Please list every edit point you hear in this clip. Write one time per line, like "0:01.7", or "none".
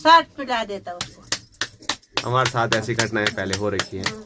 none